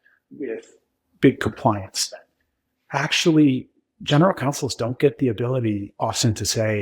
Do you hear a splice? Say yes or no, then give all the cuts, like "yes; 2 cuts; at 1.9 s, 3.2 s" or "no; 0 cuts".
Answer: yes; 1 cut; at 5.9 s